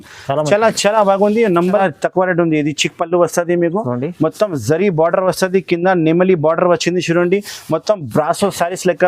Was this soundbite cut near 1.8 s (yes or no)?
yes